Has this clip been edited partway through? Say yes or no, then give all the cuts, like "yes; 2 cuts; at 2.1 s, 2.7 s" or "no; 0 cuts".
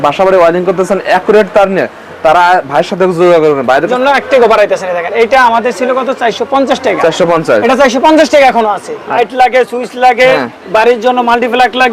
yes; 2 cuts; at 3.9 s, 9.2 s